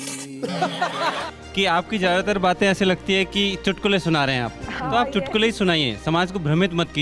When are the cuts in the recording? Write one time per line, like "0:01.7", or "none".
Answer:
0:01.3